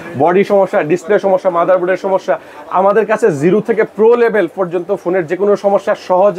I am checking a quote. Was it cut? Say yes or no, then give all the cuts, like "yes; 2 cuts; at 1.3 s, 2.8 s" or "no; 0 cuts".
no; 0 cuts